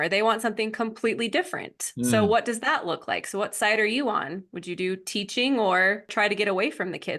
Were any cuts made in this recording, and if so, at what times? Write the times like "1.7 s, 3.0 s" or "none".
6.1 s